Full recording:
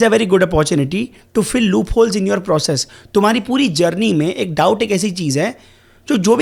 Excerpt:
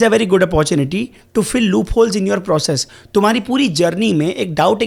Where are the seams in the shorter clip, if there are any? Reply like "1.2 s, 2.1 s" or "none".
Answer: none